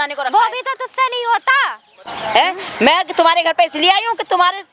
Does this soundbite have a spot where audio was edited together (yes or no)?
no